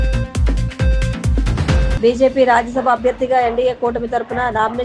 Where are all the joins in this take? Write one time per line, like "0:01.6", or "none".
0:01.8